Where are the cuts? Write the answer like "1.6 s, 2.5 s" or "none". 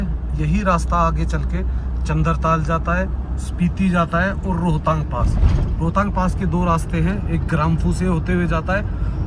none